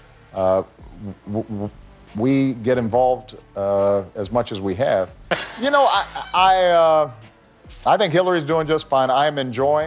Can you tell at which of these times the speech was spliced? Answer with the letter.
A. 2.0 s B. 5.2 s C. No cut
B